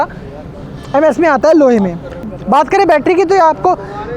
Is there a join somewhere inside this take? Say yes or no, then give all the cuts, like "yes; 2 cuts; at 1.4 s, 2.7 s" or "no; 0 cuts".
no; 0 cuts